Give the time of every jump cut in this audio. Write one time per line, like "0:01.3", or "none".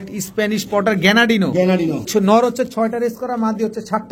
0:02.1